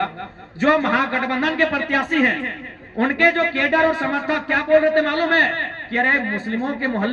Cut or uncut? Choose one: uncut